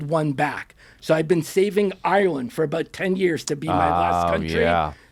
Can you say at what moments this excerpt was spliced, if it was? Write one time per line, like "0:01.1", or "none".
none